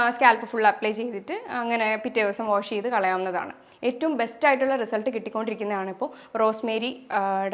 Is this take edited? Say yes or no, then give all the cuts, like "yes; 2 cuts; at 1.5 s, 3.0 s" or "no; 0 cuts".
no; 0 cuts